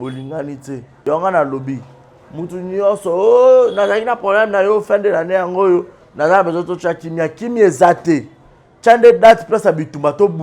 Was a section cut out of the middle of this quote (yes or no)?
yes